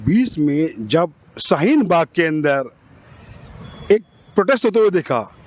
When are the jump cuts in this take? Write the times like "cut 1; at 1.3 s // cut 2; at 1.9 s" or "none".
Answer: none